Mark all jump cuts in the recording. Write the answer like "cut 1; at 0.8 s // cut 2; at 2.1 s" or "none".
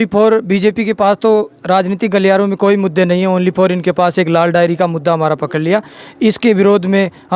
none